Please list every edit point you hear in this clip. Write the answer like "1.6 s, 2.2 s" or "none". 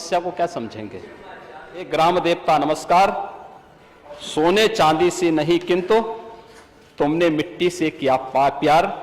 1.9 s